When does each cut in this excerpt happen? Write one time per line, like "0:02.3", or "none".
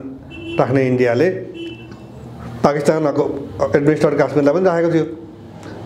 none